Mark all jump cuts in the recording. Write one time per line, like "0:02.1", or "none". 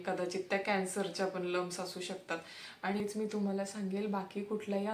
0:03.0